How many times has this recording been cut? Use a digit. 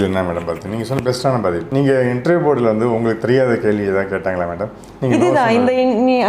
1